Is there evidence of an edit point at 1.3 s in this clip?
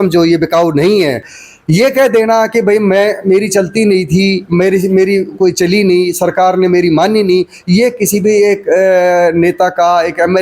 yes; 1 cut; at 1.3 s

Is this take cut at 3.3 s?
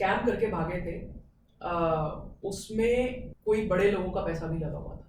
yes; 1 cut; at 3.3 s

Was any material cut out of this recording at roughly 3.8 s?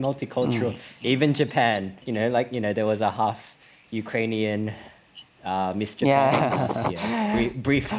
no; 1 cut; at 2.0 s

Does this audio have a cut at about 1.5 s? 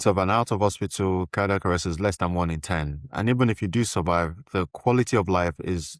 no; 0 cuts

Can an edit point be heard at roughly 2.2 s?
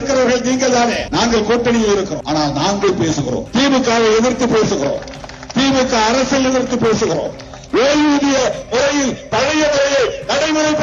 yes; 3 cuts; at 1.0 s, 2.2 s, 3.4 s

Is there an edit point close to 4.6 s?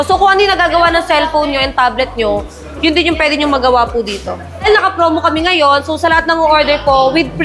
yes; 1 cut; at 4.6 s

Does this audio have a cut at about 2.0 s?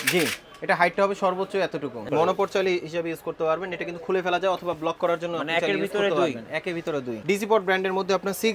yes; 2 cuts; at 2.0 s, 7.1 s

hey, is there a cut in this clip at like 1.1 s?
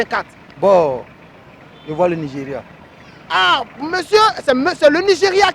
no; 0 cuts

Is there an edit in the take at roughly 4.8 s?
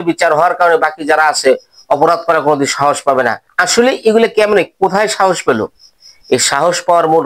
no; 1 cut; at 3.5 s

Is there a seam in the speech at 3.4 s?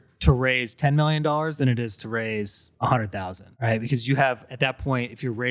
yes; 2 cuts; at 2.6 s, 3.4 s

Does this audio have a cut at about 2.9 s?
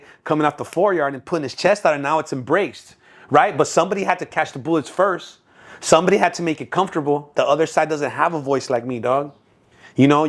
no; 1 cut; at 7.3 s

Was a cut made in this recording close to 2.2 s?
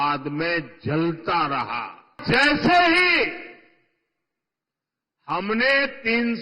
yes; 1 cut; at 2.2 s

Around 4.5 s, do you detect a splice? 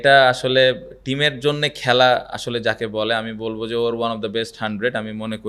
no; 0 cuts

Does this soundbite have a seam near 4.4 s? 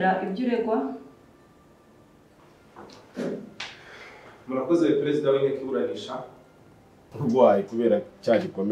no; 1 cut; at 7.1 s

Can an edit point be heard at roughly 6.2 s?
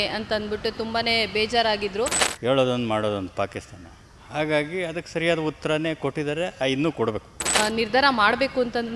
no; 2 cuts; at 2.2 s, 7.6 s

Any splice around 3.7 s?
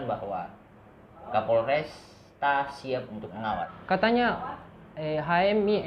yes; 1 cut; at 3.7 s

